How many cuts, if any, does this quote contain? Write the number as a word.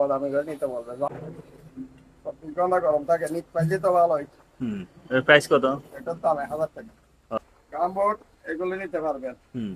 two